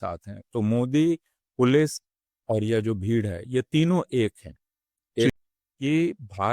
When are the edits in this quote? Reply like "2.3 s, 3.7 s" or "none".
5.4 s